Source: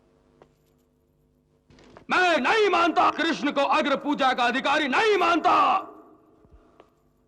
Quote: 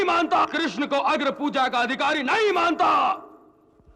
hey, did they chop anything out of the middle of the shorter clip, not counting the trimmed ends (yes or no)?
no